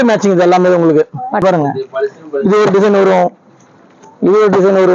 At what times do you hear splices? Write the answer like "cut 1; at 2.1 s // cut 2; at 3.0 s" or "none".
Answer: cut 1; at 1.4 s

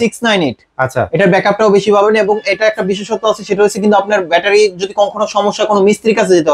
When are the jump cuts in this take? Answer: none

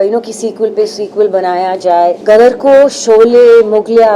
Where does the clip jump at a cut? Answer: cut 1; at 2.2 s

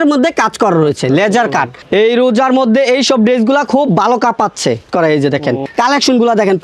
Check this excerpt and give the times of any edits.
cut 1; at 1.8 s // cut 2; at 4.9 s // cut 3; at 5.6 s

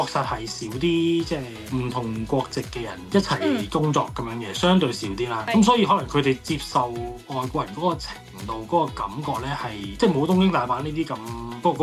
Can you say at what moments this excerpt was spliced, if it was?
none

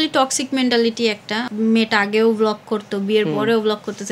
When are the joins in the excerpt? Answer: cut 1; at 1.4 s

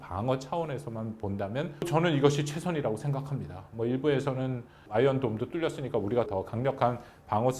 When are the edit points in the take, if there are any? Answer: cut 1; at 1.9 s // cut 2; at 6.3 s

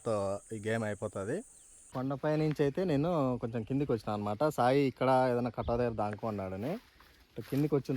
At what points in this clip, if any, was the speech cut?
cut 1; at 1.9 s

